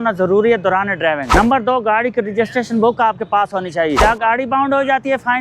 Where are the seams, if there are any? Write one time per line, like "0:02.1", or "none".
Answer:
0:01.2
0:04.0

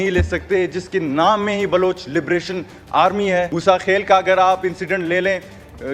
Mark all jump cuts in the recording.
0:03.5

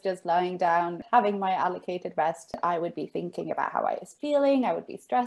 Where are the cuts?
0:01.0
0:02.6

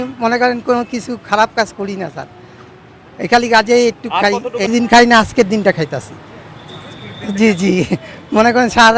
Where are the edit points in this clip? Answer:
0:04.7

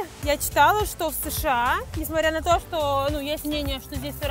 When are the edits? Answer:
none

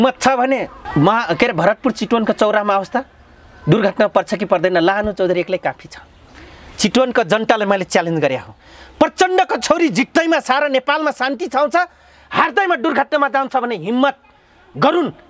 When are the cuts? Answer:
none

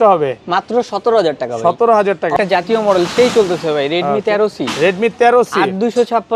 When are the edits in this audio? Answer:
0:02.4

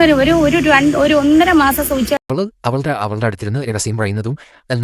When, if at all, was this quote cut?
0:02.2

